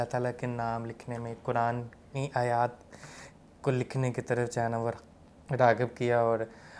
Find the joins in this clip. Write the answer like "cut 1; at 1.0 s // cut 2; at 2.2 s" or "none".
none